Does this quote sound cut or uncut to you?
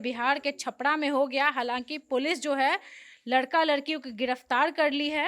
uncut